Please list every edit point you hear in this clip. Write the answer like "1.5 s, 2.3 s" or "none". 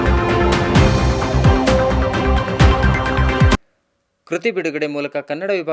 3.7 s